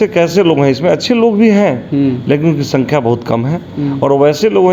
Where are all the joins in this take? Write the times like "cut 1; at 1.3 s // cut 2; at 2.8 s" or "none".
none

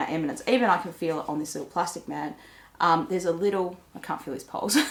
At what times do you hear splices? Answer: none

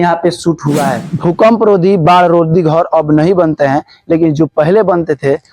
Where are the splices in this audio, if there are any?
cut 1; at 1.0 s

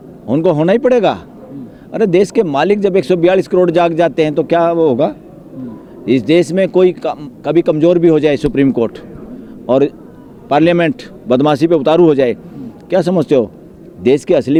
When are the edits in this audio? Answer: none

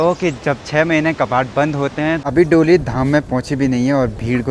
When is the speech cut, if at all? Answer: cut 1; at 2.2 s

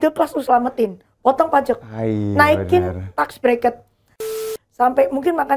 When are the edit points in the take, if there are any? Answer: cut 1; at 4.3 s

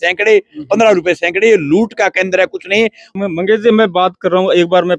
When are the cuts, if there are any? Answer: cut 1; at 3.0 s

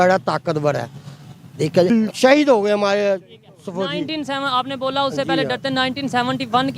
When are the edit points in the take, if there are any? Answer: cut 1; at 1.9 s

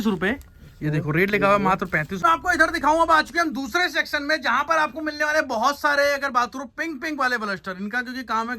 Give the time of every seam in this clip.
cut 1; at 2.2 s

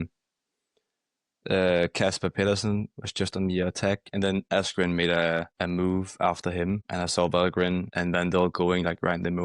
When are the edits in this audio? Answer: cut 1; at 4.5 s // cut 2; at 5.5 s // cut 3; at 6.9 s // cut 4; at 7.9 s

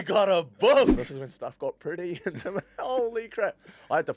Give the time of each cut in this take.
cut 1; at 0.9 s

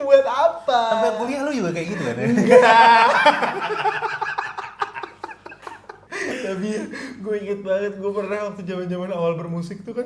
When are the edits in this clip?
none

